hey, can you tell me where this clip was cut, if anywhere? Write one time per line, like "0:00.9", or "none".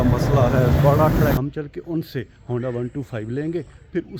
0:01.4